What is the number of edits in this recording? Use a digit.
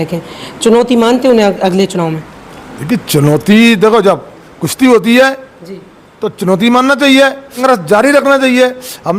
1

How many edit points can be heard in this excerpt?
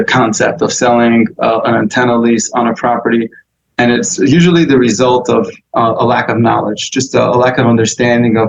0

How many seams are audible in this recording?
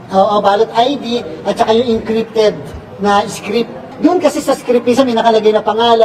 1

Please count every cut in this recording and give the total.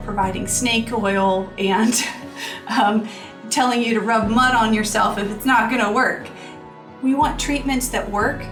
0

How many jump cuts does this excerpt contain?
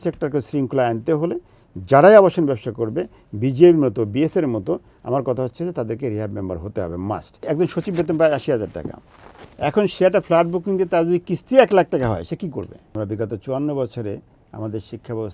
2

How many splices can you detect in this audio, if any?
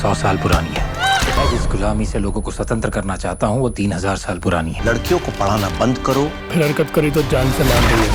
1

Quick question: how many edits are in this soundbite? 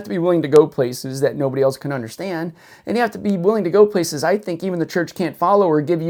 0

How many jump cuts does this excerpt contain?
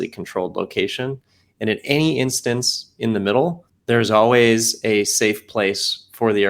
1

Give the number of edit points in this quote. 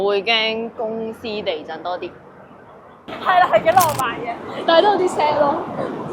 1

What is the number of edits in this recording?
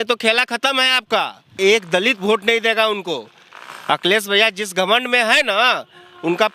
1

